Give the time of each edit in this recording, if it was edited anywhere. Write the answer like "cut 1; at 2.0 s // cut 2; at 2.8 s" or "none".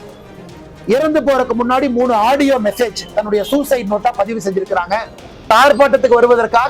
cut 1; at 5.5 s

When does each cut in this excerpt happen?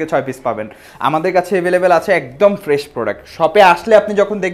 none

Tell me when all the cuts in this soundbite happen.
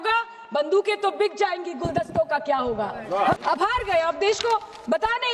cut 1; at 3.4 s

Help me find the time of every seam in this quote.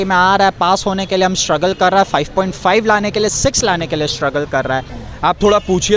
cut 1; at 5.0 s

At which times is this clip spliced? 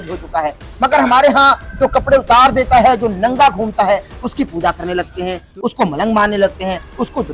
none

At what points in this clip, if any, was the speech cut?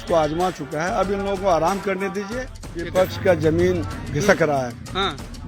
cut 1; at 2.8 s

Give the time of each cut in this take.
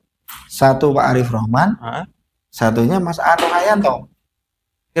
none

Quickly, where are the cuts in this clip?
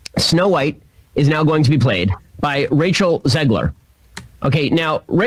none

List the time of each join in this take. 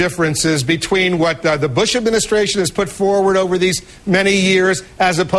none

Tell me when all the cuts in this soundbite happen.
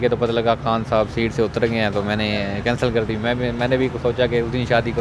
none

